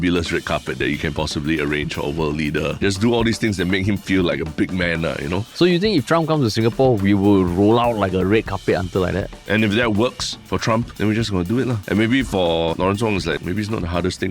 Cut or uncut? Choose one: cut